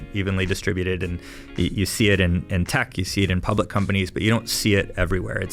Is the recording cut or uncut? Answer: uncut